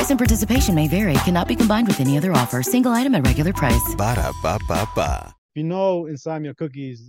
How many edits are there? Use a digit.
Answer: 1